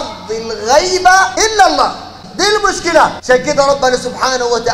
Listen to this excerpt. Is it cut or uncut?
cut